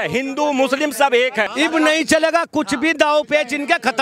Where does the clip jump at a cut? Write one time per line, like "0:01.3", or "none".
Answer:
0:01.5

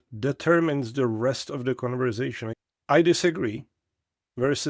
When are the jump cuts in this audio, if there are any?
0:02.5

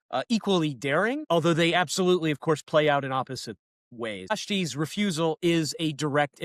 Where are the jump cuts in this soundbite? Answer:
0:01.2
0:04.3

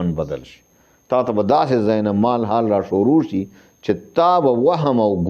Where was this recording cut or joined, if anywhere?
none

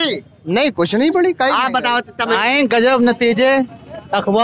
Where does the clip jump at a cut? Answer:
0:02.4

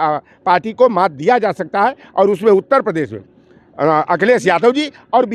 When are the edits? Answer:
none

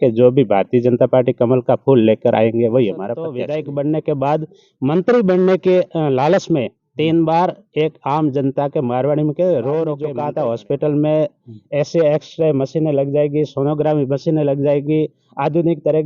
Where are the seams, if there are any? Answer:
0:03.3
0:10.1

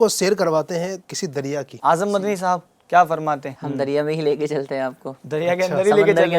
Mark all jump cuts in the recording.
0:01.2
0:03.6

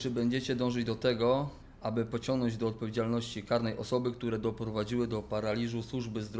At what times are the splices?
none

